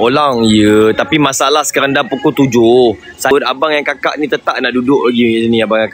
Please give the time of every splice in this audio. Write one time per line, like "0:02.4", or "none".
0:03.3